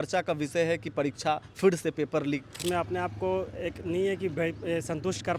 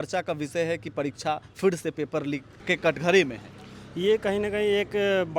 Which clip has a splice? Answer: first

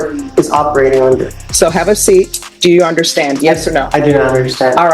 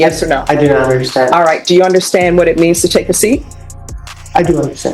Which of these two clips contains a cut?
first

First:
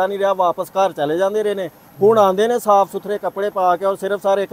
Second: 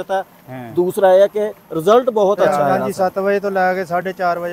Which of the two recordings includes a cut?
second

